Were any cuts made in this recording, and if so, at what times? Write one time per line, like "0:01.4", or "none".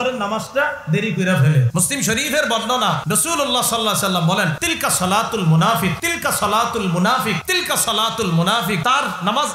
0:01.7
0:03.0
0:04.6
0:06.1
0:07.4
0:08.8